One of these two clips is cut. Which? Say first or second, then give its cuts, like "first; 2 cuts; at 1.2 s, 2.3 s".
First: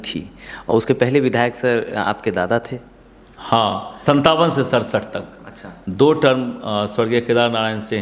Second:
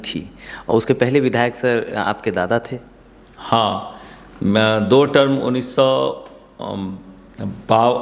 first; 1 cut; at 3.9 s